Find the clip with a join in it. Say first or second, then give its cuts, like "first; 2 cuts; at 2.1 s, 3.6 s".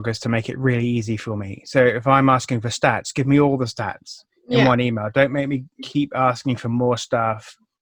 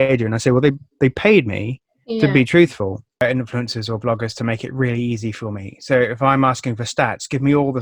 second; 1 cut; at 3.2 s